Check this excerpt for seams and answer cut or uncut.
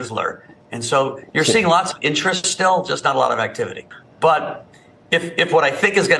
cut